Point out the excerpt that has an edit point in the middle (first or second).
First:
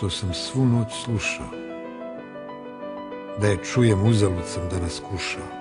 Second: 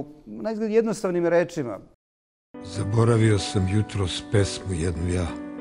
second